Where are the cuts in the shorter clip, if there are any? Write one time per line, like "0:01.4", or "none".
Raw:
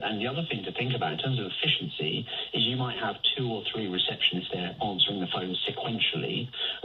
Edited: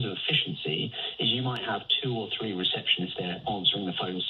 none